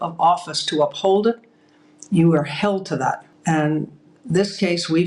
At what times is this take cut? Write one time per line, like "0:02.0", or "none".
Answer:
0:03.3